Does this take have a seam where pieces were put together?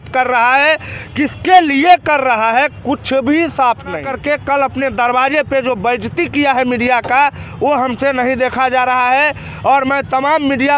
yes; 1 cut; at 4.1 s

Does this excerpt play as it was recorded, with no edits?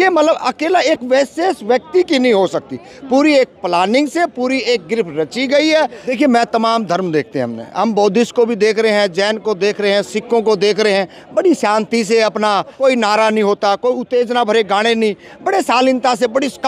no; 2 cuts; at 6.0 s, 12.8 s

